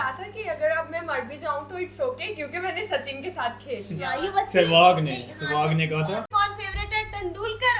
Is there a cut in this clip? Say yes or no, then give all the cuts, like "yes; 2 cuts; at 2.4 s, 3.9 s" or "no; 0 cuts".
yes; 1 cut; at 6.3 s